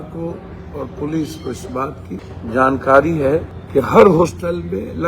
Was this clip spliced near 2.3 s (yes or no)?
yes